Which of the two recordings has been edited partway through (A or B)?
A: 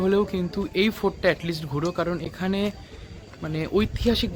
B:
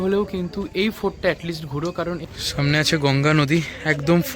B